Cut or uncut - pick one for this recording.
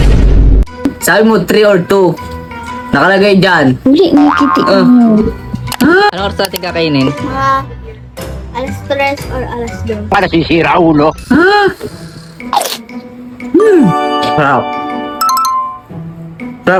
uncut